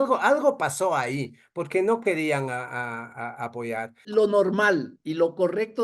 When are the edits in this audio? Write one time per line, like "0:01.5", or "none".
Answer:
0:04.0